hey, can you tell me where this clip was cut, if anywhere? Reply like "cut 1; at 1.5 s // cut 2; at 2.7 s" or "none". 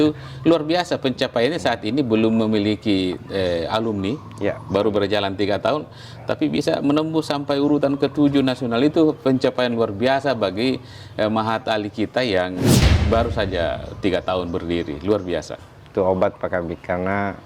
none